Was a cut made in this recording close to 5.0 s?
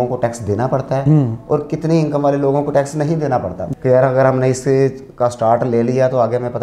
no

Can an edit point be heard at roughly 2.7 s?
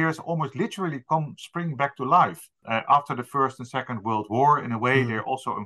yes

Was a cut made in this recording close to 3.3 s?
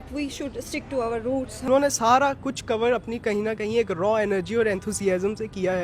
no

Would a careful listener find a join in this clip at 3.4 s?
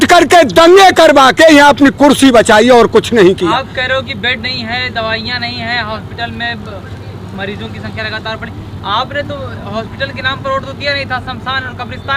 no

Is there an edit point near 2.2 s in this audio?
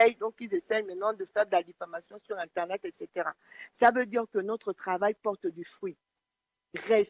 yes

